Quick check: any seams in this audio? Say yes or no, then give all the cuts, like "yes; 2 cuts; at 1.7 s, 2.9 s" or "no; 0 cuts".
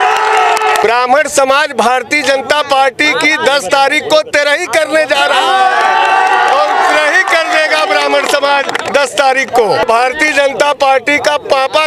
yes; 2 cuts; at 0.8 s, 9.8 s